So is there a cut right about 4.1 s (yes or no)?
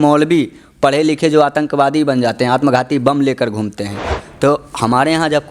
yes